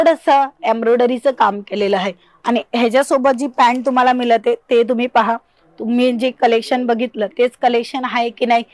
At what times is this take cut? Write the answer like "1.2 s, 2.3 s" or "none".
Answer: none